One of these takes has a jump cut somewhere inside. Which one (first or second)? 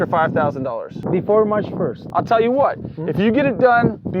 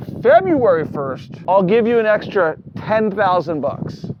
first